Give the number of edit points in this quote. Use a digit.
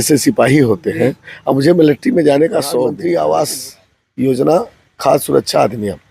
1